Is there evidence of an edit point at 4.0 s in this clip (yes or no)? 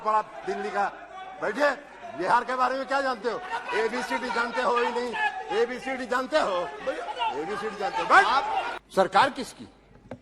no